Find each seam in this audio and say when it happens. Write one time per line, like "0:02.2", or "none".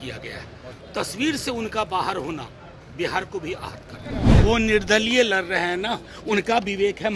0:04.4